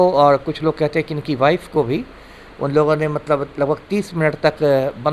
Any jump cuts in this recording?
no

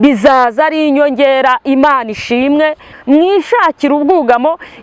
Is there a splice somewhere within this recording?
yes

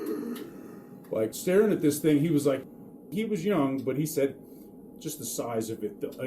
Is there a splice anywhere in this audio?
yes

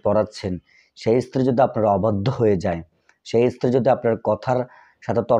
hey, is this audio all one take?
yes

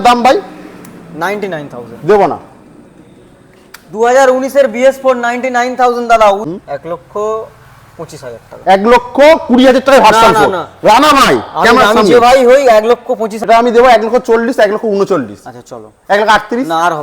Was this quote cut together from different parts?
yes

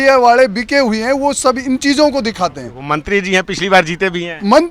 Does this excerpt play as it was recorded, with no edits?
no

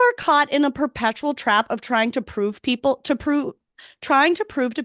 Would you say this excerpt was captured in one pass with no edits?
yes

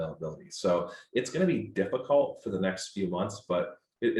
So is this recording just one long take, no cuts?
yes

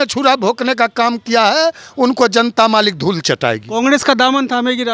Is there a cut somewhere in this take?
no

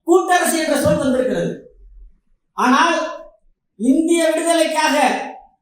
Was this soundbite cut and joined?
no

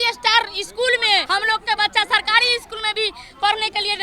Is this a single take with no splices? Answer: no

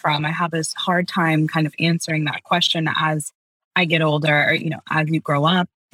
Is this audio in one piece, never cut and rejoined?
yes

